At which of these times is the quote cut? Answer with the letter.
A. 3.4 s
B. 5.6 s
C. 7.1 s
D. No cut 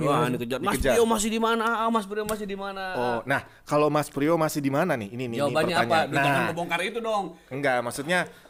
D